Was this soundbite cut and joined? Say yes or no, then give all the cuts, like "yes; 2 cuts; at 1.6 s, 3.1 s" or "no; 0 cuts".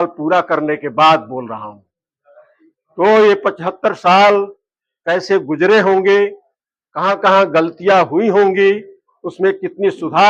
no; 0 cuts